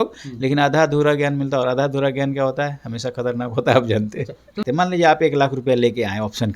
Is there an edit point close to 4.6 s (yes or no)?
yes